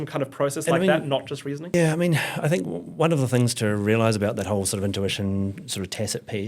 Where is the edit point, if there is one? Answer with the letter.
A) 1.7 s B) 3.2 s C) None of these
A